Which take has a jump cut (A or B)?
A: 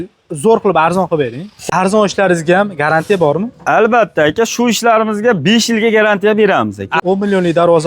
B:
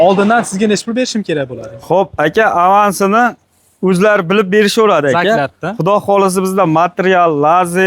A